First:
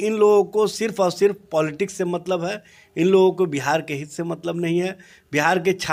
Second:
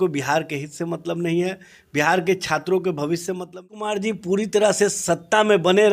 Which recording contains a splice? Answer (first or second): second